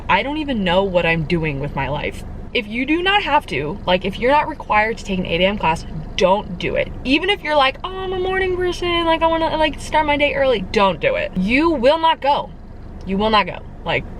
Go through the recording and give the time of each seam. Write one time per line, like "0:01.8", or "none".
0:02.5